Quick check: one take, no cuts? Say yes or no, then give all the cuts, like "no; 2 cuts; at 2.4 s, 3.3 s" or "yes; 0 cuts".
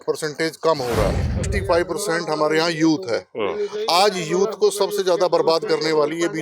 no; 1 cut; at 1.5 s